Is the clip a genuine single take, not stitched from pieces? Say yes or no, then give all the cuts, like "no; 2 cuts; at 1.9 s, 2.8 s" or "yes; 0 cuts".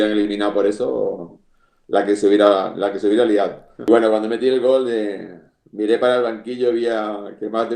no; 1 cut; at 3.7 s